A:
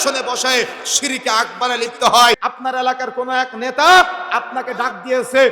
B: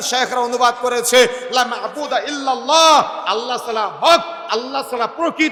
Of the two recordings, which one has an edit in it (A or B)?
A